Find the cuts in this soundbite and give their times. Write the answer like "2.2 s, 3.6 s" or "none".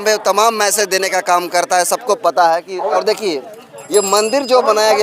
3.0 s